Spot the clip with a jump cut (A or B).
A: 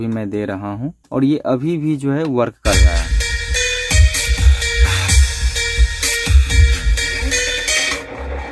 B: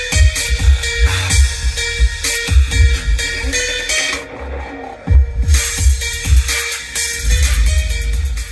A